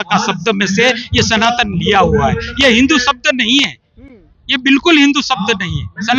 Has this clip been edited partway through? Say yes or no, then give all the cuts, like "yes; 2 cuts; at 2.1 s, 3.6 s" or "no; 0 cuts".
no; 0 cuts